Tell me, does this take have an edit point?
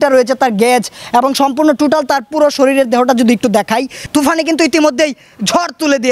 yes; 1 cut; at 4.1 s

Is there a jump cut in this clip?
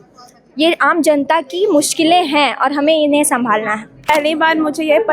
yes; 1 cut; at 4.1 s

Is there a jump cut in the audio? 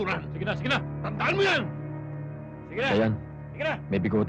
no; 0 cuts

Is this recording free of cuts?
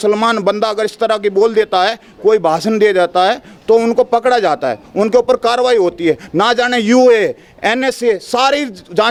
yes; 0 cuts

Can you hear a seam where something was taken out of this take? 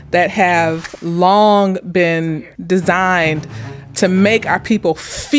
yes; 3 cuts; at 0.9 s, 2.3 s, 3.8 s

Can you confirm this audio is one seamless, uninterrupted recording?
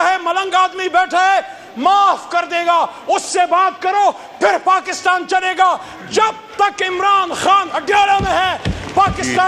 yes; 0 cuts

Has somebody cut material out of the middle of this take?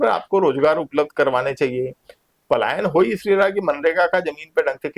no; 0 cuts

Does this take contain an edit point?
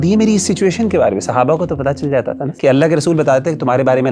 yes; 1 cut; at 2.4 s

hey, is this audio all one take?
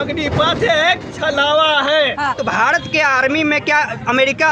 no; 1 cut; at 2.4 s

